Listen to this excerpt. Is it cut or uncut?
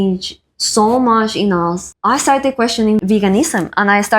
cut